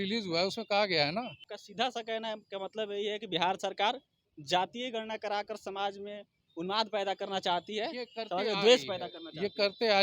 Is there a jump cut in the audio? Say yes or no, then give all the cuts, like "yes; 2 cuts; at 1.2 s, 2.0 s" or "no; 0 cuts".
yes; 1 cut; at 1.4 s